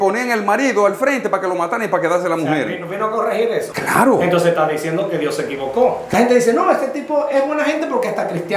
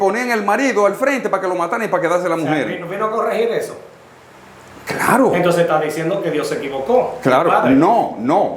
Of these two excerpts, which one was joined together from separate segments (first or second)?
first